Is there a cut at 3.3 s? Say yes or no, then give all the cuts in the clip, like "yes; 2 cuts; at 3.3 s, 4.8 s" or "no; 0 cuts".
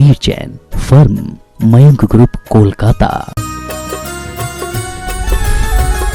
yes; 1 cut; at 3.3 s